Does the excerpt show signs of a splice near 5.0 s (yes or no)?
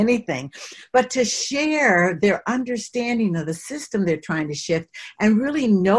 no